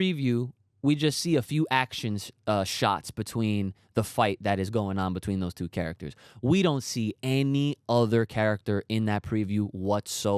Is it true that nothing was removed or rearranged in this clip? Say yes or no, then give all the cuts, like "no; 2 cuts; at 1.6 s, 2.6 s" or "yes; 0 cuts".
yes; 0 cuts